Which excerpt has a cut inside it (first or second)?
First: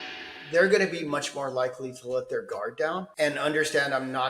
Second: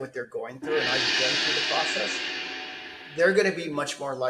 first